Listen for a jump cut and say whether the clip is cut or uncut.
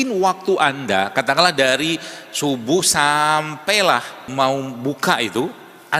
cut